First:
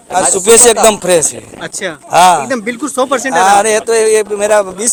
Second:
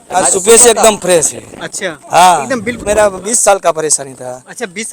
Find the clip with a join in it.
second; 1 cut; at 2.8 s

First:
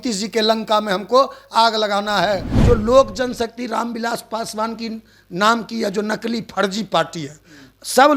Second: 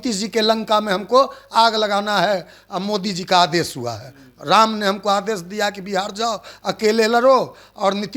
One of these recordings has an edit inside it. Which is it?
first; 1 cut; at 2.5 s

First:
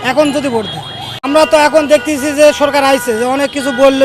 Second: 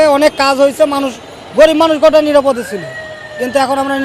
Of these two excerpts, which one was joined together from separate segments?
first; 1 cut; at 1.2 s

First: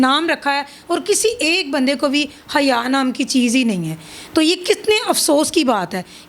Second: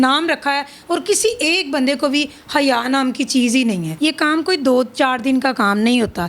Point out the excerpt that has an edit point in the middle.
second; 1 cut; at 3.9 s

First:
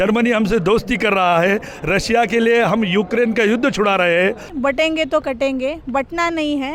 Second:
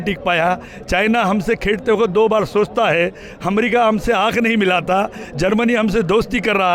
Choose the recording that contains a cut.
first; 1 cut; at 4.5 s

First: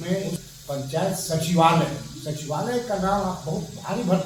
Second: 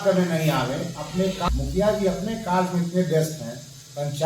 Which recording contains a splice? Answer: second; 1 cut; at 1.5 s

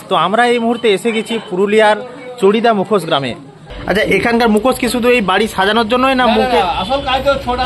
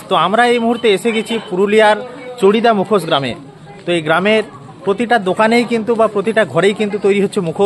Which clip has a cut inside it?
first; 1 cut; at 3.7 s

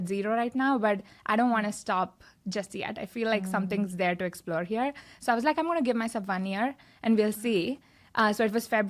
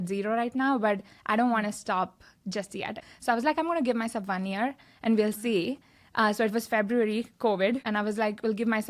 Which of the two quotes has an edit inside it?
second; 2 cuts; at 3.0 s, 7.8 s

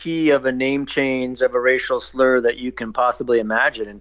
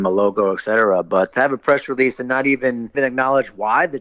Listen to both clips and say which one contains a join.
second; 2 cuts; at 1.3 s, 2.9 s

